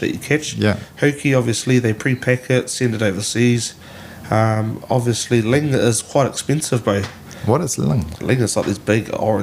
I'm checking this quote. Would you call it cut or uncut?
uncut